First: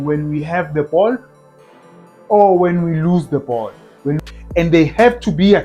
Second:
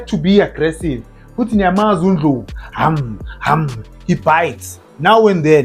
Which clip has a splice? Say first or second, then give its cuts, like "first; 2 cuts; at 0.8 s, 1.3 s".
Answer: first; 1 cut; at 4.2 s